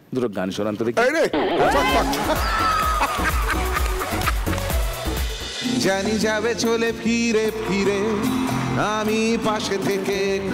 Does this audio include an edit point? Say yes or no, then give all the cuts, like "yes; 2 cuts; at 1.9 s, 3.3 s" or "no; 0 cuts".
yes; 1 cut; at 5.6 s